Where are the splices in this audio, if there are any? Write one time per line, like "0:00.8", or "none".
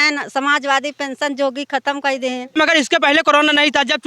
0:02.5